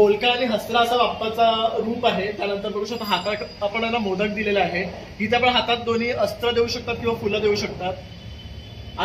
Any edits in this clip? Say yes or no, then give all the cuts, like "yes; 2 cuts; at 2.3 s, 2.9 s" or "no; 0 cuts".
no; 0 cuts